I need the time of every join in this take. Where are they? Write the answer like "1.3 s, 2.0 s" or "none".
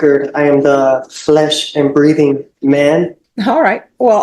3.2 s

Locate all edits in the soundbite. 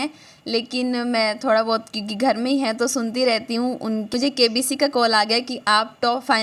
4.1 s

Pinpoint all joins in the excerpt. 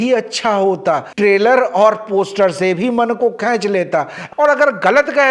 1.1 s, 4.2 s

